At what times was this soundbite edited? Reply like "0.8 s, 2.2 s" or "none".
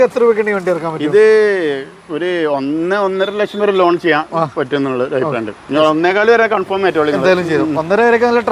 none